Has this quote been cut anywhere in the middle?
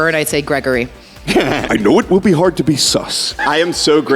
yes; 2 cuts; at 1.7 s, 3.3 s

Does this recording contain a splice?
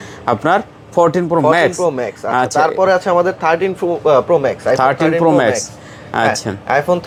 no; 0 cuts

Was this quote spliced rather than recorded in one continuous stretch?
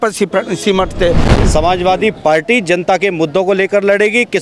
yes; 1 cut; at 1.3 s

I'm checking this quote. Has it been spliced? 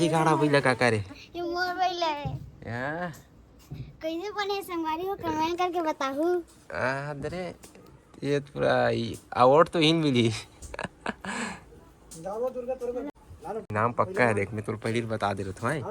yes; 1 cut; at 13.1 s

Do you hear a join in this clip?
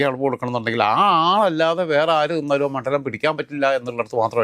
no; 0 cuts

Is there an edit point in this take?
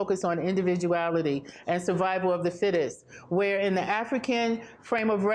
no; 0 cuts

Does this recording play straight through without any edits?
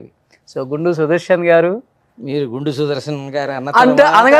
yes; 0 cuts

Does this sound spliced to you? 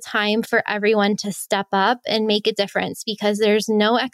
no; 0 cuts

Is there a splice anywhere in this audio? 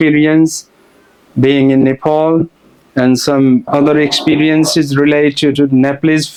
no; 0 cuts

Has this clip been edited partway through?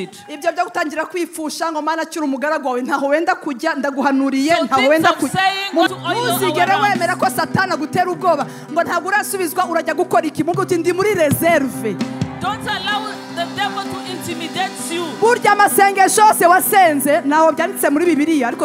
yes; 1 cut; at 5.9 s

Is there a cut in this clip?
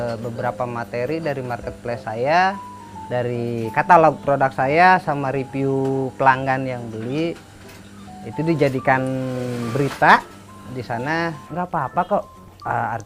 yes; 1 cut; at 11.5 s

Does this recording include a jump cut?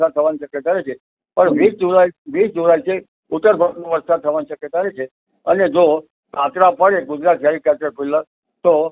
no; 0 cuts

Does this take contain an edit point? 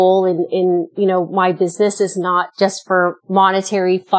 yes; 2 cuts; at 0.9 s, 2.8 s

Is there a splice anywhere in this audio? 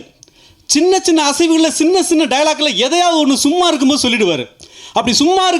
no; 0 cuts

